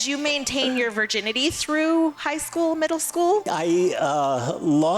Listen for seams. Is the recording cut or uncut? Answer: cut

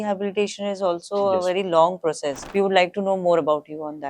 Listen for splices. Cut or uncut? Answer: cut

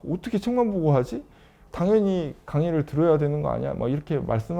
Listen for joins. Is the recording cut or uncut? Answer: cut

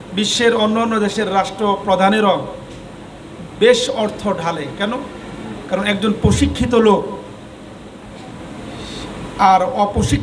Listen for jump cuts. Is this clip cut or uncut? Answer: uncut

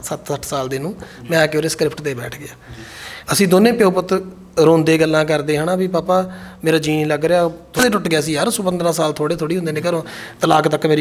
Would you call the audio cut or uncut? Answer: cut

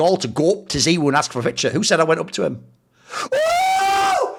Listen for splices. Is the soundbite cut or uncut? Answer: uncut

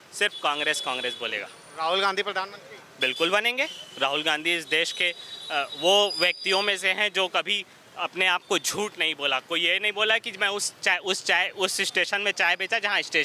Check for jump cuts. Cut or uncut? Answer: uncut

